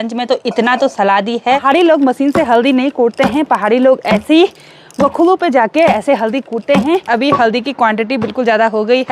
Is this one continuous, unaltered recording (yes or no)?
no